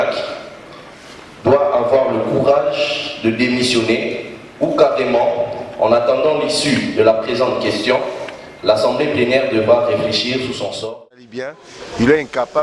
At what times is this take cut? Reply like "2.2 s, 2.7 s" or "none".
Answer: 11.2 s